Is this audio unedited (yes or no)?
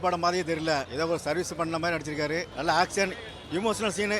no